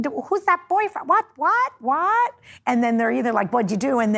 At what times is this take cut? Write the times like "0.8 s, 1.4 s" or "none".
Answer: 2.5 s